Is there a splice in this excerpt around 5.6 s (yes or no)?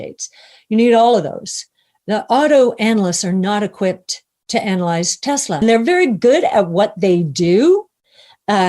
yes